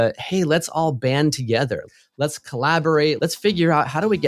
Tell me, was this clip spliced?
yes; 2 cuts; at 1.8 s, 3.2 s

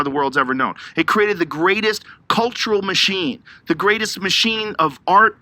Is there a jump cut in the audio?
yes; 1 cut; at 3.5 s

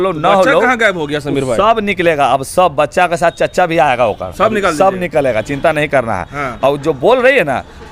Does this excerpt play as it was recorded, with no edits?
yes; 0 cuts

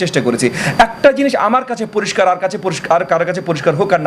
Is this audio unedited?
yes; 0 cuts

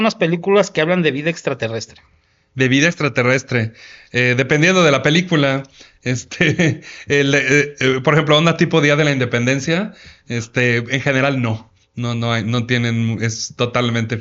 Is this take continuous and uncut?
yes; 0 cuts

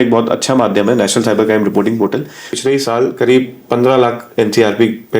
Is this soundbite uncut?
no; 1 cut; at 2.5 s

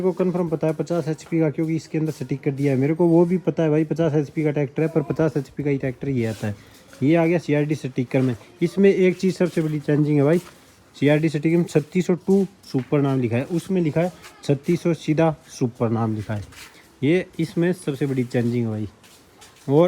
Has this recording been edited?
no; 0 cuts

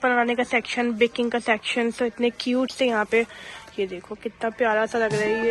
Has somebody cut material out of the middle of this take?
no; 0 cuts

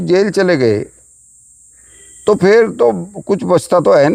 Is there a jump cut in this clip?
no; 0 cuts

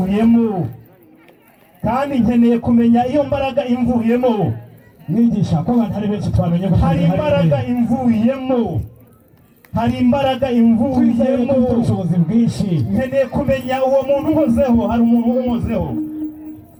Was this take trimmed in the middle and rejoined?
no; 0 cuts

